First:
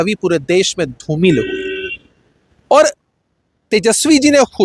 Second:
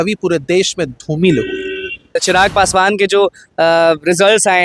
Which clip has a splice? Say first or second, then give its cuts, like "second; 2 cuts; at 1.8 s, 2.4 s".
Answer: second; 1 cut; at 2.2 s